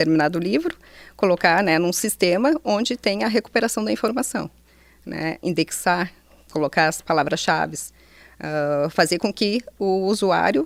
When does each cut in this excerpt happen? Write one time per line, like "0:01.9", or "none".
none

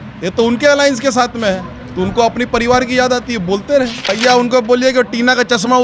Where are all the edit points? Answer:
0:04.1

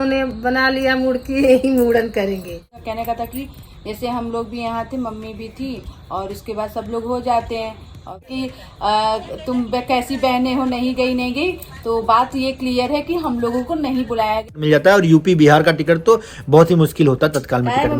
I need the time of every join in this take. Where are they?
0:02.7
0:08.3
0:14.6

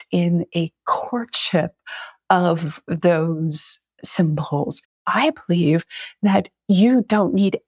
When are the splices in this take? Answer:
0:05.0

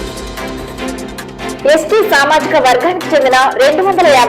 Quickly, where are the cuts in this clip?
0:01.6

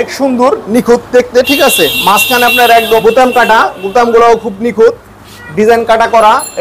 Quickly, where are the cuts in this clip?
0:03.0

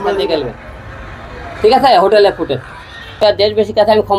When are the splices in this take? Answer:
0:03.2

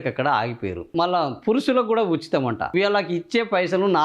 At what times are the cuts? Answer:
0:00.9
0:02.7

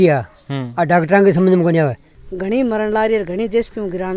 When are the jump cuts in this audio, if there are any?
0:02.1

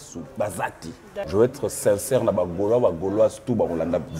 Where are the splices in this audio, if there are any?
0:01.1

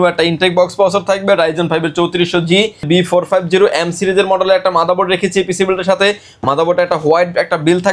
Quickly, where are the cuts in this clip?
0:02.8

